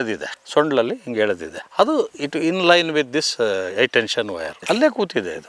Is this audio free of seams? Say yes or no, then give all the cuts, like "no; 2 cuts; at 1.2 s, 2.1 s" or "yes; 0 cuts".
no; 1 cut; at 4.5 s